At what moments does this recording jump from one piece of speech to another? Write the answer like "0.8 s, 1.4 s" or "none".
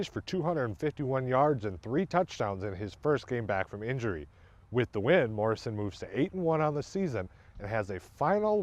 none